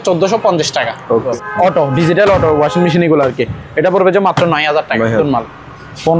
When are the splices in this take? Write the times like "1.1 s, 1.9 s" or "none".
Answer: 1.3 s, 5.2 s